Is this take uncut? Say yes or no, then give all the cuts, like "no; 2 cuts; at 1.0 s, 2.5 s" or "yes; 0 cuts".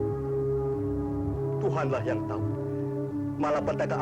yes; 0 cuts